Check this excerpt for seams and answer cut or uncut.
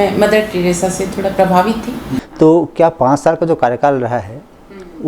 cut